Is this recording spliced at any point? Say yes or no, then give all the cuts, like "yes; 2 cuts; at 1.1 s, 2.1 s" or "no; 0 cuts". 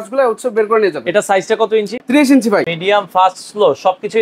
yes; 2 cuts; at 2.0 s, 2.7 s